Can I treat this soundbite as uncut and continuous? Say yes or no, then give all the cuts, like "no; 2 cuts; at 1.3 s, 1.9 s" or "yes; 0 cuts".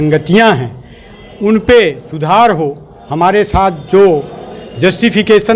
yes; 0 cuts